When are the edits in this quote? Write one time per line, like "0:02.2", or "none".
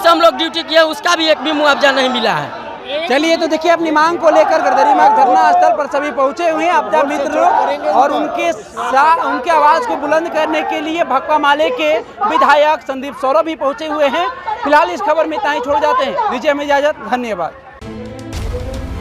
none